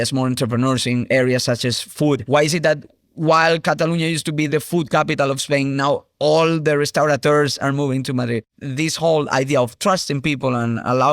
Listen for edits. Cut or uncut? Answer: cut